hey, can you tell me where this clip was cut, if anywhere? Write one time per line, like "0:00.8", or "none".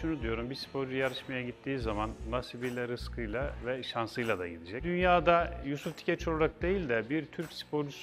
0:04.8

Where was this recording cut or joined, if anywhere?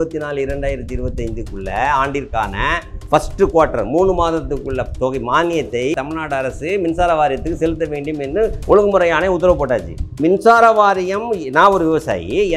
0:02.9
0:05.9
0:10.1

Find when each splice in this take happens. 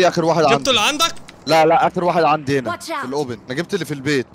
0:03.4

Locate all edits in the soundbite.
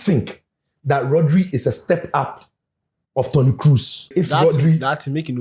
0:04.1

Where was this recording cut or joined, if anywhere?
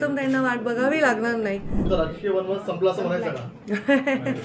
0:01.7

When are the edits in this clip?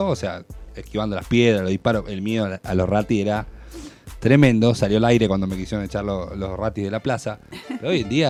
none

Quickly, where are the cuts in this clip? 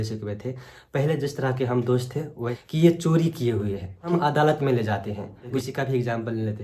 0:02.5
0:04.1
0:05.6

